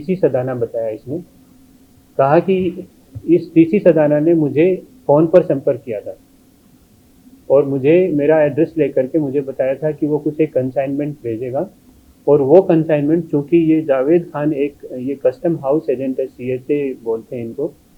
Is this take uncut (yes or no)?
yes